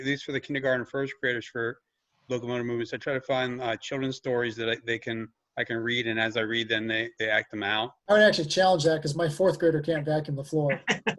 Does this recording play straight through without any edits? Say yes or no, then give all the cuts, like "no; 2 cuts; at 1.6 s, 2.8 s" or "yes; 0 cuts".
no; 1 cut; at 8.0 s